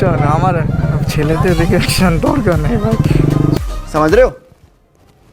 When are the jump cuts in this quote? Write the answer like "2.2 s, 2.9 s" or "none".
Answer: 3.6 s